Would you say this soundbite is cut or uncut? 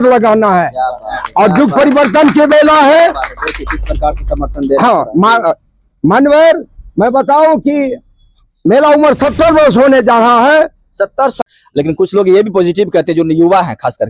cut